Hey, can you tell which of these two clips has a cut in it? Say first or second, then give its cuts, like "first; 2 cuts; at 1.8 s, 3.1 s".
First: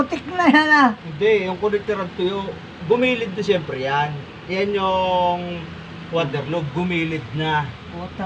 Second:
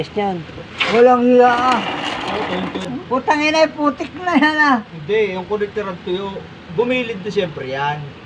second; 1 cut; at 2.9 s